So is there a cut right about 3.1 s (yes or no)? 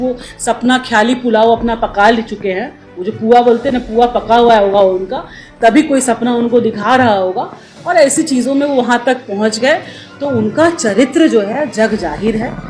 no